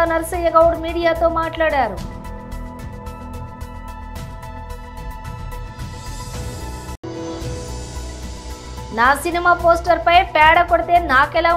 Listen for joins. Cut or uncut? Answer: uncut